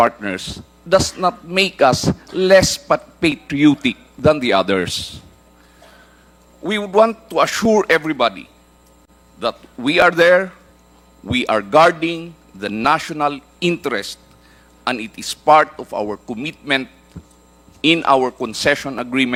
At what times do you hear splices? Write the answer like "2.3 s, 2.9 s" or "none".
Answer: none

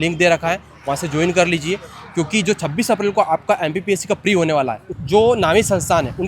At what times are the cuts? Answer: 4.9 s

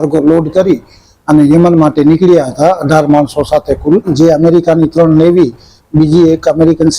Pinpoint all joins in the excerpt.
4.1 s

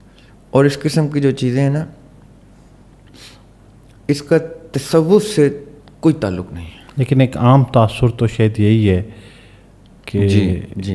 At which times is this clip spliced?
none

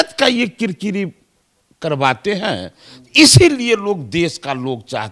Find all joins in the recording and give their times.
none

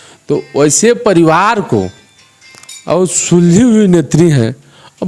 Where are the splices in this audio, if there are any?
none

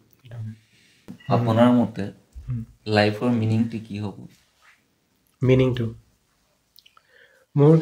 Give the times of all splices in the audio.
1.1 s

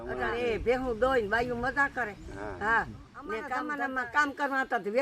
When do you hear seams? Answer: 3.7 s

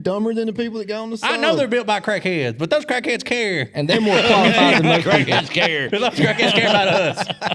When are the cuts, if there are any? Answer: none

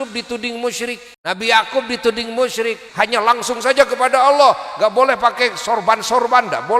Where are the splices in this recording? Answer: 1.1 s, 2.8 s

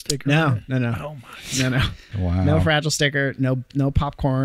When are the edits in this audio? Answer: 2.0 s

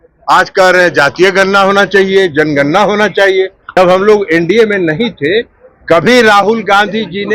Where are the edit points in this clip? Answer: 3.6 s

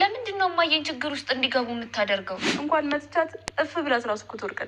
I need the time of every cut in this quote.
2.5 s

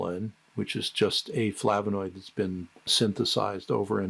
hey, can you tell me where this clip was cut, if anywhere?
2.9 s

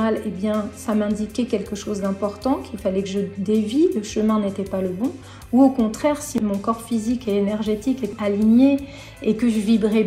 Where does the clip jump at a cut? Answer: 6.3 s, 8.1 s

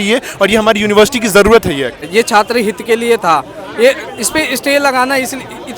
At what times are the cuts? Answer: 2.1 s

